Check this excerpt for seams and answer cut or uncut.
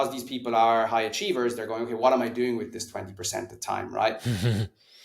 uncut